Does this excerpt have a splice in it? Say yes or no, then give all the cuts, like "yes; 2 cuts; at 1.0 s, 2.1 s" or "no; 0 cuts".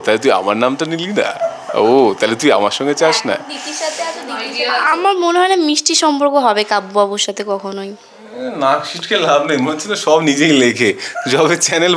yes; 1 cut; at 4.5 s